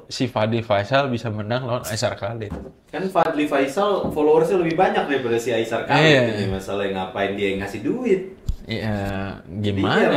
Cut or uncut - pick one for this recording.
uncut